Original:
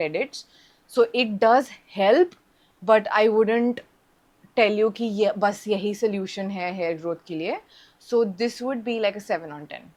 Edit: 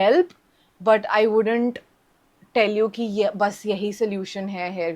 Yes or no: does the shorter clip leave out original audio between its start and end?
no